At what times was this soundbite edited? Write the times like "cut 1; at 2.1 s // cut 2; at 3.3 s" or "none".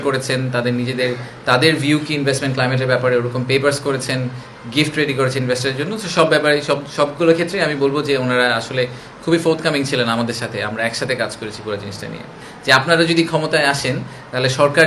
cut 1; at 12.5 s